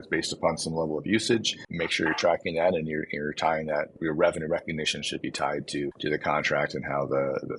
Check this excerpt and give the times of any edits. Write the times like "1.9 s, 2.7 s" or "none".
1.6 s, 3.9 s, 6.0 s